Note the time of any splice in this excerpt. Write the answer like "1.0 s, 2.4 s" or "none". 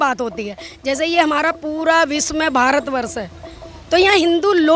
none